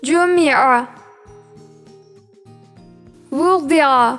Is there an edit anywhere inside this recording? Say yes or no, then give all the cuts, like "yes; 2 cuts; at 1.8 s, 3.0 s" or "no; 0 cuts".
yes; 2 cuts; at 1.1 s, 3.3 s